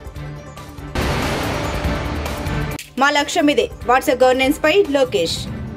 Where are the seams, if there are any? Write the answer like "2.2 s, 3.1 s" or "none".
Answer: 0.9 s